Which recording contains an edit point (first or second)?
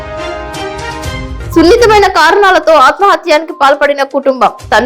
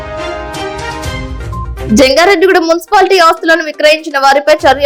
first